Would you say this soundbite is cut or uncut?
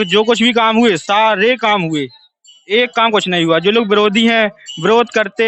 uncut